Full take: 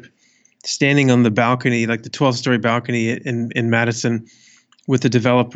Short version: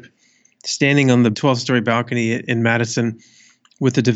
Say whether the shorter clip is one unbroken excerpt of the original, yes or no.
no